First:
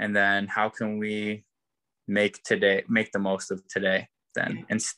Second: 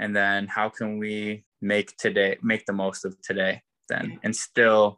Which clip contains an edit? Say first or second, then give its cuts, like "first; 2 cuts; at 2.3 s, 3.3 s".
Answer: second; 1 cut; at 1.5 s